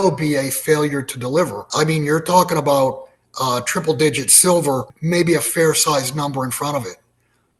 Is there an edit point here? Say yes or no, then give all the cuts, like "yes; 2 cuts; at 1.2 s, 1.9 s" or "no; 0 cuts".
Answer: yes; 2 cuts; at 1.6 s, 4.9 s